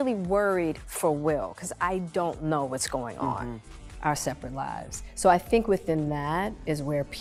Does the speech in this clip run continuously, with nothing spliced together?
yes; 0 cuts

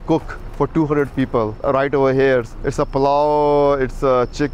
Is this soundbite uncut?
yes; 0 cuts

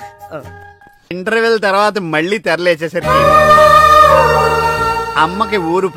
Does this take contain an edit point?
yes; 1 cut; at 1.1 s

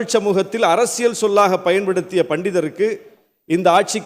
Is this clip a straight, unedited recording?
yes; 0 cuts

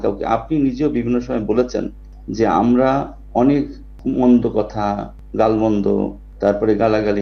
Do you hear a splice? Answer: no; 0 cuts

